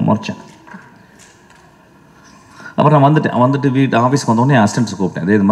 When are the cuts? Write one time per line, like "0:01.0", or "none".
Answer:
none